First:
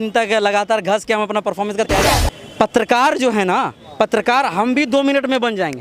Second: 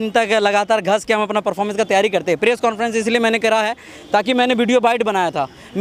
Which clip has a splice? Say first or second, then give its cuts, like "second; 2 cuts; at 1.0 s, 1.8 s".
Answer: first; 2 cuts; at 2.0 s, 3.8 s